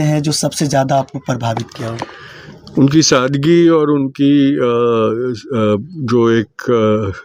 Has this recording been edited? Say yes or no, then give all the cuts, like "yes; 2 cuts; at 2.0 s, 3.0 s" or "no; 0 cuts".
no; 0 cuts